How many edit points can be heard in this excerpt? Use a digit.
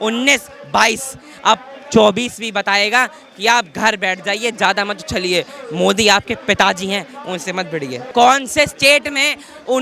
1